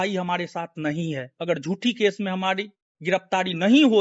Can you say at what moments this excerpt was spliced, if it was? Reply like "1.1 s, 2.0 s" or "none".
1.3 s